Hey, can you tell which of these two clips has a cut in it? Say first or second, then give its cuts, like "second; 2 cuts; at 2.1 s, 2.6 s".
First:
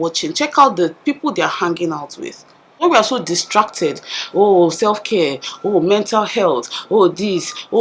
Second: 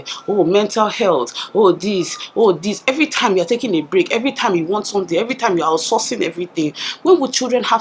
first; 1 cut; at 2.8 s